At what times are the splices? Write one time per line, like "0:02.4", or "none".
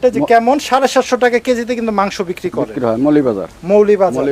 none